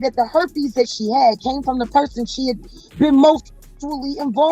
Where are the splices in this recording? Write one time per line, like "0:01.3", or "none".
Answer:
none